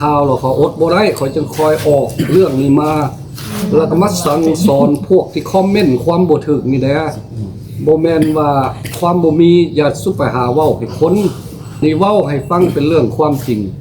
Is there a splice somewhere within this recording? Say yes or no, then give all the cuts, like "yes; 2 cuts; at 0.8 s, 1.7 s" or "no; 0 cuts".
yes; 1 cut; at 11.8 s